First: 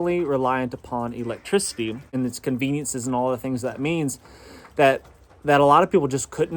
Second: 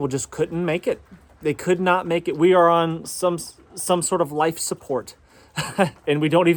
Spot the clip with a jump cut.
first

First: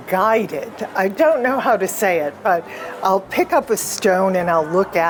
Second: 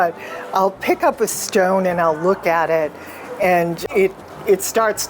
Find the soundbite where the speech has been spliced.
second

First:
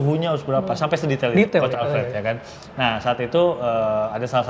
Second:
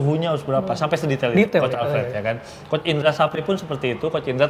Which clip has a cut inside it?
first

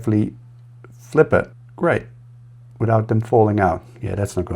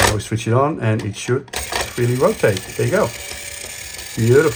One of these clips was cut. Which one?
first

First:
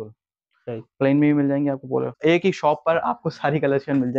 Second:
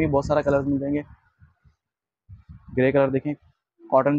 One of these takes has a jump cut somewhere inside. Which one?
first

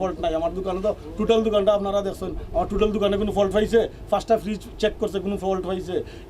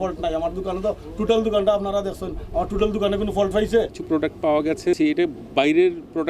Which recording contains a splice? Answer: second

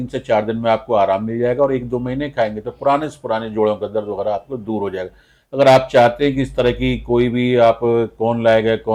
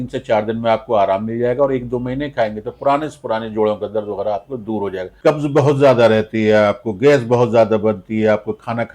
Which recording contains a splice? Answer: second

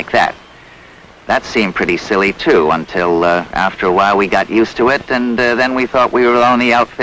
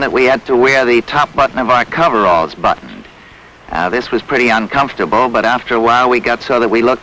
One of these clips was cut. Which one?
second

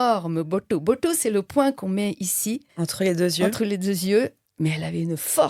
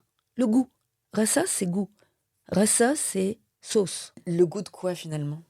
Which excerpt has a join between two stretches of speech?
first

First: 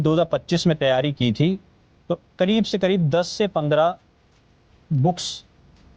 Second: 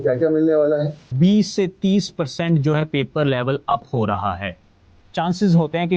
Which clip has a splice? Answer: second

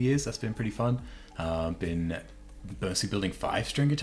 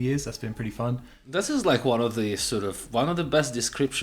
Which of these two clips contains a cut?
second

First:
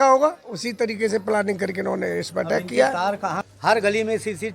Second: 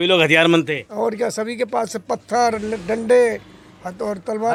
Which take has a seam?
first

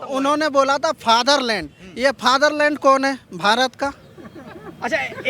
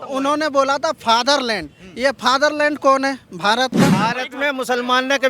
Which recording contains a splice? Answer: second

